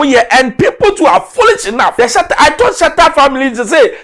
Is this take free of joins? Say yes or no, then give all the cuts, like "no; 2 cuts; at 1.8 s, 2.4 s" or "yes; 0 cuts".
no; 1 cut; at 1.9 s